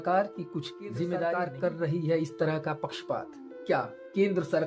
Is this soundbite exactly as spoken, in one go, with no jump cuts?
no; 1 cut; at 1.5 s

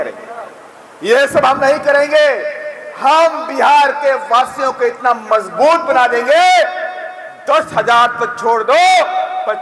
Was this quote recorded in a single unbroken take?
yes; 0 cuts

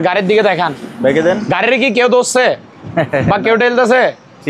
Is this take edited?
no; 0 cuts

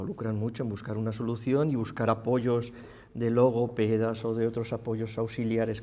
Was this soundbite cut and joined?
no; 0 cuts

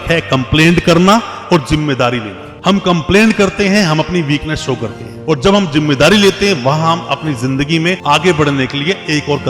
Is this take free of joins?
yes; 0 cuts

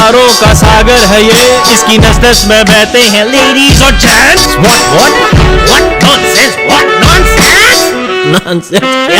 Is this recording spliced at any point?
no; 0 cuts

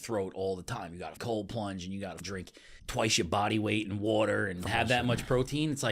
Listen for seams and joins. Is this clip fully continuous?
no; 3 cuts; at 1.2 s, 2.5 s, 4.7 s

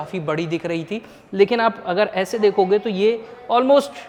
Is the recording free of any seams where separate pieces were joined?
yes; 0 cuts

